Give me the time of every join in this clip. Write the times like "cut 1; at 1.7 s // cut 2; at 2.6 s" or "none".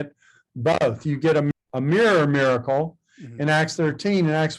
cut 1; at 1.5 s